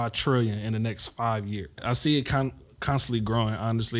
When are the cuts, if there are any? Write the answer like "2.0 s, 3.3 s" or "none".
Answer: 1.8 s

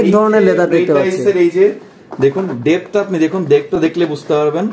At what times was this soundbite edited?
none

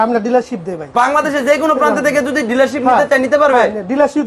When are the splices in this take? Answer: 0.9 s

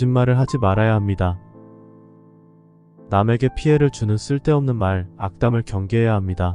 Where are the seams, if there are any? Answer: 1.3 s, 3.1 s

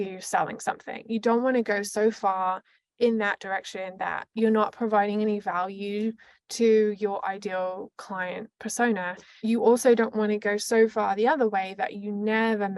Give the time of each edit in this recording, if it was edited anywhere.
9.2 s

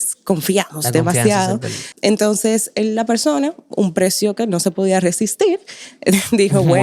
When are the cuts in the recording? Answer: 1.8 s

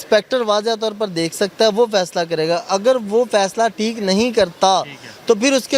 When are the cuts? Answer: none

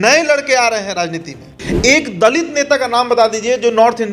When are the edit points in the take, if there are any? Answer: 1.6 s

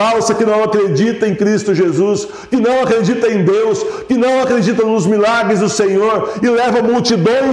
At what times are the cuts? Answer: none

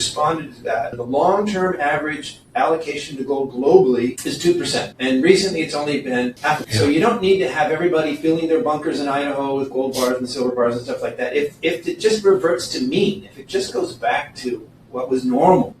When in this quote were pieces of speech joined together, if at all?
0.9 s

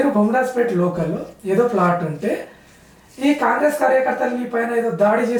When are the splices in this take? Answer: none

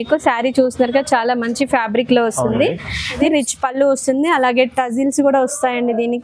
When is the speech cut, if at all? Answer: 3.2 s

